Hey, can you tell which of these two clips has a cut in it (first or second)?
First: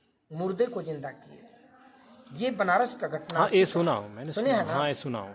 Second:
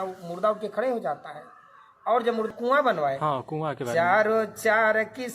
second